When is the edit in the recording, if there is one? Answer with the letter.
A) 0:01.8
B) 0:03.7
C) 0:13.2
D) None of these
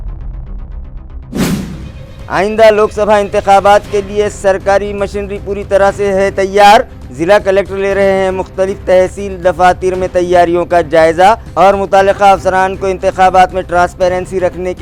A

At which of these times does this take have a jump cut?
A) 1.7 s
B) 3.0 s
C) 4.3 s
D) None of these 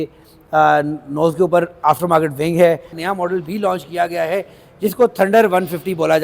B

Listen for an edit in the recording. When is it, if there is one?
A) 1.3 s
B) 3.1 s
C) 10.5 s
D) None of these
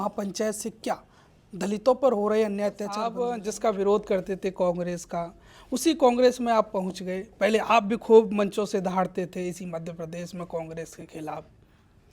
B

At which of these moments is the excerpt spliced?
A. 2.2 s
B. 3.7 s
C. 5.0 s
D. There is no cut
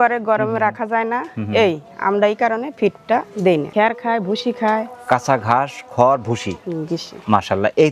B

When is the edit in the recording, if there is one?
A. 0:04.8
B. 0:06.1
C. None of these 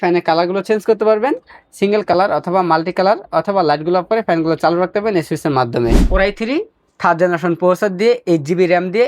B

